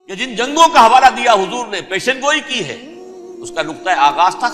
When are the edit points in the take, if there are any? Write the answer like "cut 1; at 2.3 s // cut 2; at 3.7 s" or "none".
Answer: none